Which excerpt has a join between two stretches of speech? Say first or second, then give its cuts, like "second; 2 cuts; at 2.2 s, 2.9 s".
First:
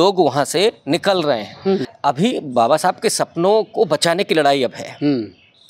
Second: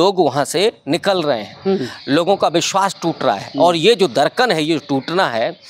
first; 1 cut; at 1.9 s